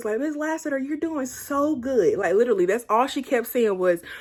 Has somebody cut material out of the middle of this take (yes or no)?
no